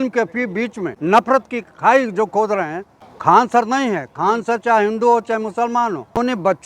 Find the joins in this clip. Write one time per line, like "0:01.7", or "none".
0:01.2
0:03.4
0:05.6